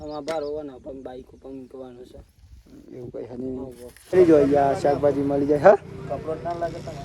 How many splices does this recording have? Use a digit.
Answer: 1